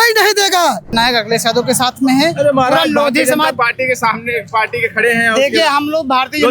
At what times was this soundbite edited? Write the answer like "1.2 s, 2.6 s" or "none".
0.9 s